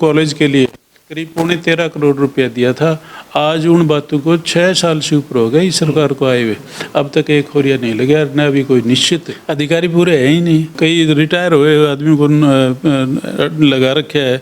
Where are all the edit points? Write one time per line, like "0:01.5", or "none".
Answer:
0:09.4
0:10.8